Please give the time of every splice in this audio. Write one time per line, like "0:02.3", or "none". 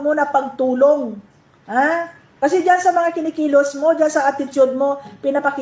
0:01.2